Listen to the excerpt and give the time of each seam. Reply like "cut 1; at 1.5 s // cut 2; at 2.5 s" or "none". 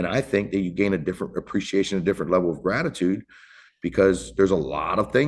none